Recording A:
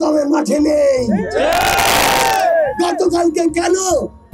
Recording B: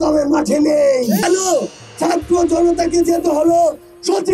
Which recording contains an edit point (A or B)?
B